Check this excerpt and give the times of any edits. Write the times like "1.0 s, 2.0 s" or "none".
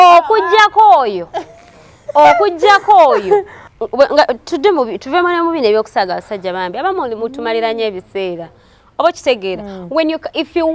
3.6 s